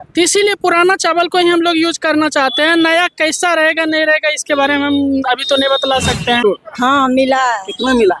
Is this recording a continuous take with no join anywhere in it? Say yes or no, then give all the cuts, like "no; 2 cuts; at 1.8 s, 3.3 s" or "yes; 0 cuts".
no; 1 cut; at 6.4 s